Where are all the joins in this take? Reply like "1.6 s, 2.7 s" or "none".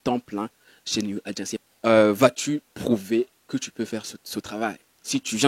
1.7 s